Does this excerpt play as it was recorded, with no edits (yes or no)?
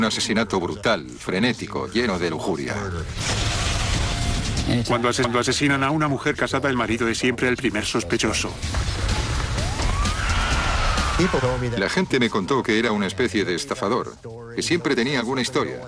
yes